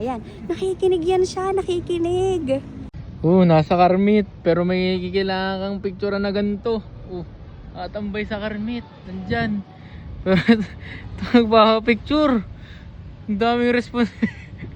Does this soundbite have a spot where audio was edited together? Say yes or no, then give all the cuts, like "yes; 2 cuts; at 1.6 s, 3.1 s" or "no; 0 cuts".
yes; 1 cut; at 2.7 s